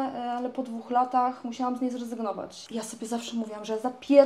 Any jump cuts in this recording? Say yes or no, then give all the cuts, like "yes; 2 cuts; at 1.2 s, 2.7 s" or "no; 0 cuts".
yes; 1 cut; at 2.5 s